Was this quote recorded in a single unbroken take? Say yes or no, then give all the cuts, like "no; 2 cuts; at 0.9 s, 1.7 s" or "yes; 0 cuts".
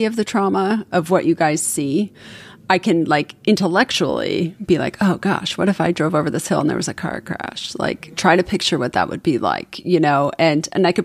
yes; 0 cuts